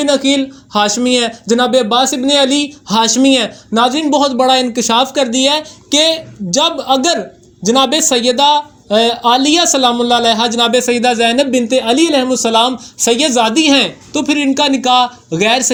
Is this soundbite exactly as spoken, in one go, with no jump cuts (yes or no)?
yes